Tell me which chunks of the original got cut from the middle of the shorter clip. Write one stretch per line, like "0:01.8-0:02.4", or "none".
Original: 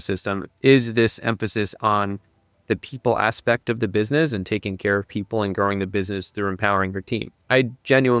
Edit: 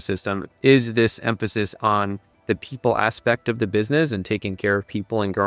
0:02.3-0:02.5